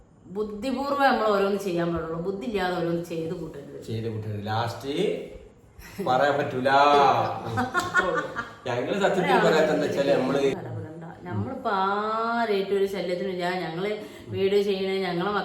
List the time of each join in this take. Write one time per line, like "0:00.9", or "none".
0:10.5